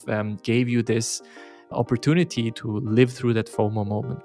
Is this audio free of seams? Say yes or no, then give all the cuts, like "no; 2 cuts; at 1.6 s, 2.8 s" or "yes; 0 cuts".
no; 2 cuts; at 1.6 s, 2.5 s